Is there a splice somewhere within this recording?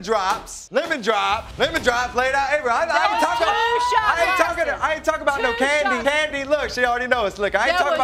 no; 0 cuts

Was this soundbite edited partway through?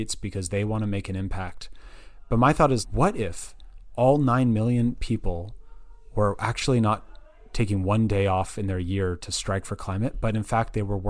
no; 0 cuts

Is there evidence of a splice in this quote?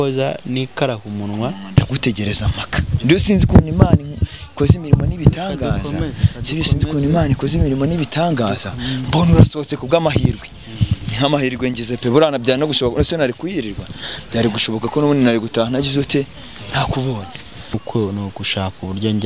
yes; 2 cuts; at 1.8 s, 17.8 s

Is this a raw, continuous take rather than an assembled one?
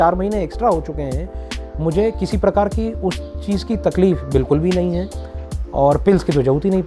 no; 1 cut; at 5.3 s

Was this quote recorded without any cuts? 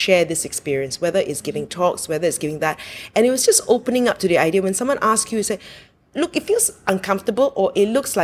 yes; 0 cuts

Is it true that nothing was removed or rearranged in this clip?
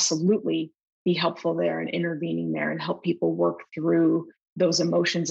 yes; 0 cuts

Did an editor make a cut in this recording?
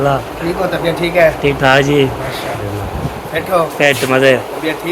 yes; 1 cut; at 2.6 s

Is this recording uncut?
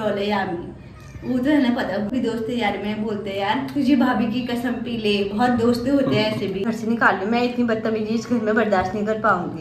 no; 2 cuts; at 2.1 s, 6.6 s

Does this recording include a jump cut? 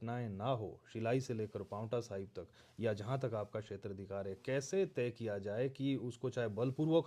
no; 0 cuts

